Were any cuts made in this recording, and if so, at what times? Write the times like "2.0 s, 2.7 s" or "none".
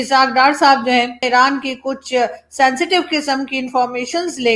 1.2 s